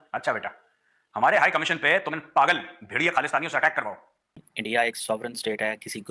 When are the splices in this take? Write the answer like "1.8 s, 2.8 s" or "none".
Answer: 4.4 s